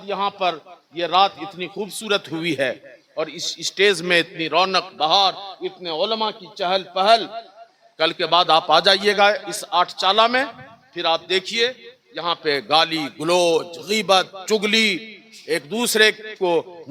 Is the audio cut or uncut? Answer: uncut